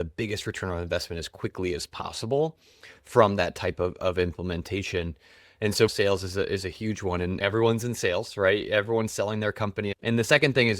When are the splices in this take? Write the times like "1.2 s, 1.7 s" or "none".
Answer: 5.9 s, 7.4 s, 10.0 s